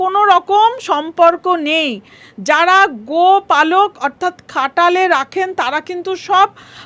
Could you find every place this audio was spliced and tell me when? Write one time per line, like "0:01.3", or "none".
0:01.9

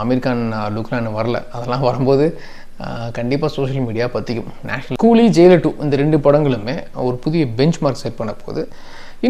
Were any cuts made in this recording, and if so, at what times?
0:05.0

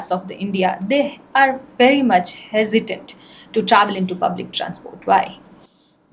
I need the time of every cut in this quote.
none

